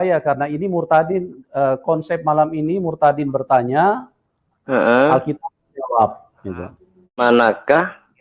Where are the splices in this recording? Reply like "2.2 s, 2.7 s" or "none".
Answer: 7.2 s

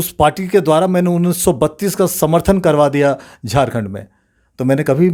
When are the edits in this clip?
none

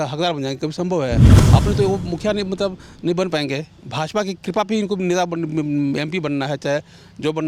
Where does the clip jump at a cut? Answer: 1.3 s

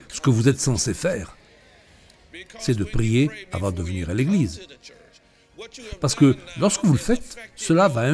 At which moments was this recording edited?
none

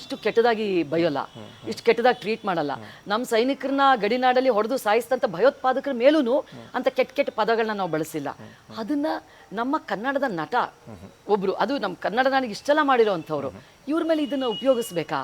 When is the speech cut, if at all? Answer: none

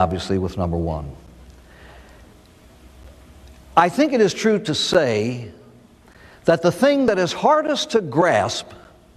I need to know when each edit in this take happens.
none

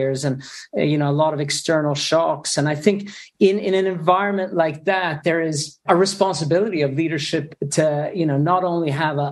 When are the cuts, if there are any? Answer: none

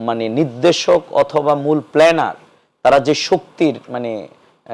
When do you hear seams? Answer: none

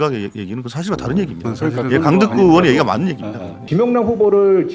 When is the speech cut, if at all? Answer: 3.6 s

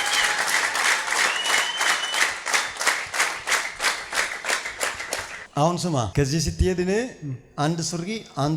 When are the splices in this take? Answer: none

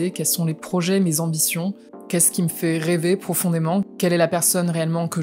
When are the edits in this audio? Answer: 1.9 s

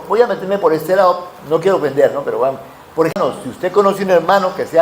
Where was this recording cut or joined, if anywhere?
3.1 s

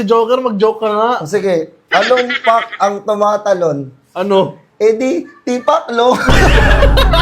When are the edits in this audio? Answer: none

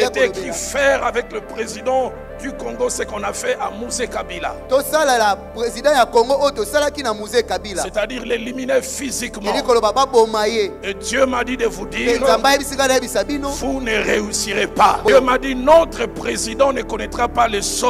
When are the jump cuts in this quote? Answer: 15.1 s

